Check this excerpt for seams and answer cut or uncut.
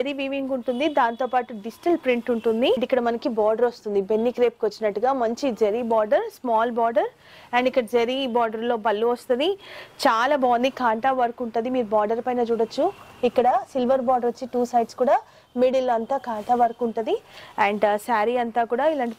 cut